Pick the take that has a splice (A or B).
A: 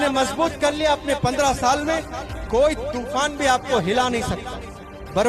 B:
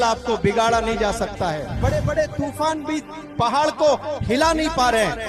B